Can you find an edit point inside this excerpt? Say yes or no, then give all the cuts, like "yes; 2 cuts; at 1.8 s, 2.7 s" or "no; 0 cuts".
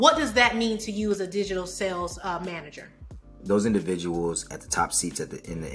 yes; 1 cut; at 3.4 s